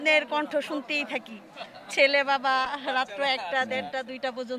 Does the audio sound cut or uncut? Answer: uncut